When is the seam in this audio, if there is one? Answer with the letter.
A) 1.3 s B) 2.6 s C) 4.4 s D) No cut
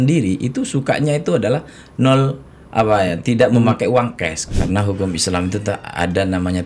C